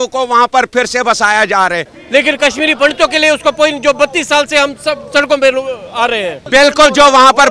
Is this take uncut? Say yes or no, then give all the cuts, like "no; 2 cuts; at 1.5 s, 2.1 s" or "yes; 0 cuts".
no; 2 cuts; at 1.9 s, 6.4 s